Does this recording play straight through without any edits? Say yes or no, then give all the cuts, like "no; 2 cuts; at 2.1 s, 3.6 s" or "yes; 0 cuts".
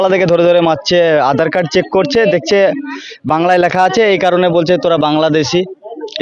yes; 0 cuts